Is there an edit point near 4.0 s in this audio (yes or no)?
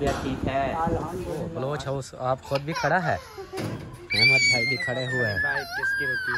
no